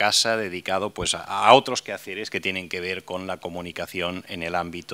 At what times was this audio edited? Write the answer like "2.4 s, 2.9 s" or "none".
3.0 s